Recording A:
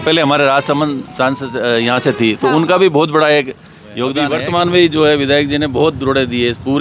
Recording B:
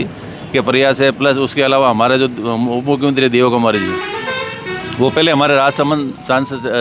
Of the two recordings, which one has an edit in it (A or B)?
A